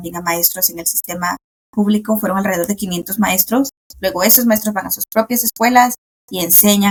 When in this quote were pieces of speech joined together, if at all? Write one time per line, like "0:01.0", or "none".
none